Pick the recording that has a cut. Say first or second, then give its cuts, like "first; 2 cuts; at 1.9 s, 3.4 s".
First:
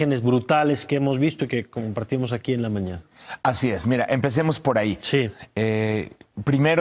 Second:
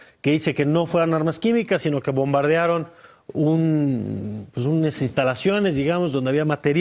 second; 1 cut; at 4.3 s